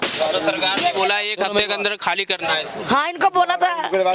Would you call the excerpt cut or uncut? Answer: uncut